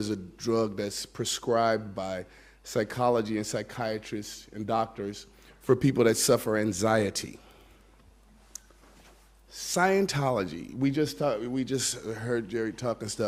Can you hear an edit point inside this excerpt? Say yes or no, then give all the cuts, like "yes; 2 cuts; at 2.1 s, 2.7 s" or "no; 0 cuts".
no; 0 cuts